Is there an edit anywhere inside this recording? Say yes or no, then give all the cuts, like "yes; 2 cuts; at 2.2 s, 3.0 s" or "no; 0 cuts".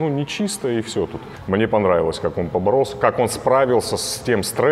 yes; 1 cut; at 1.2 s